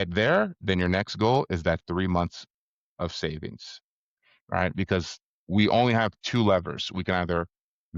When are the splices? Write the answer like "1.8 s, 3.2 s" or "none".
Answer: none